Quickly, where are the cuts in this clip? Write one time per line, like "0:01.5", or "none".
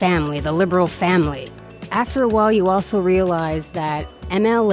0:01.5

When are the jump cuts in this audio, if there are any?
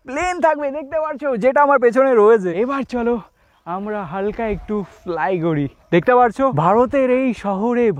0:02.5
0:06.5

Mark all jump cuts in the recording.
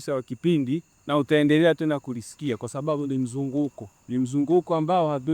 0:00.9
0:03.9

